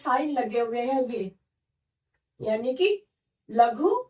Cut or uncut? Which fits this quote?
uncut